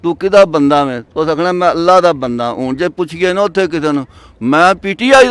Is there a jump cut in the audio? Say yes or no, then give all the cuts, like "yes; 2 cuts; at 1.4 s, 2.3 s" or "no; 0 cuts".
no; 0 cuts